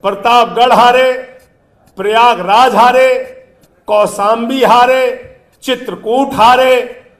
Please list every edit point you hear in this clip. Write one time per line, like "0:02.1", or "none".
none